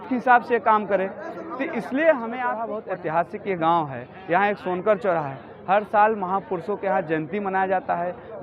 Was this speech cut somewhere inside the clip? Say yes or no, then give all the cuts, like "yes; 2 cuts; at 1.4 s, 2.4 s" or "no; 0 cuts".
yes; 1 cut; at 2.7 s